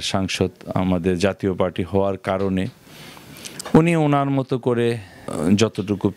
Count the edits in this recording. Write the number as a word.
zero